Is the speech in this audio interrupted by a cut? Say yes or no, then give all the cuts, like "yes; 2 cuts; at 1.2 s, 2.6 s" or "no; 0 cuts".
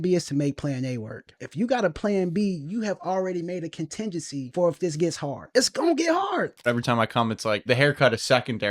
yes; 5 cuts; at 1.4 s, 4.5 s, 5.3 s, 6.7 s, 7.7 s